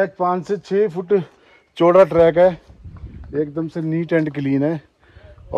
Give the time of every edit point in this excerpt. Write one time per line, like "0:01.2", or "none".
none